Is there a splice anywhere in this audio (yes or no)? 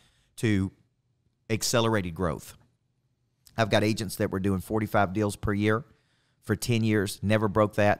no